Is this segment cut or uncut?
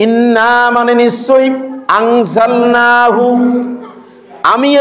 uncut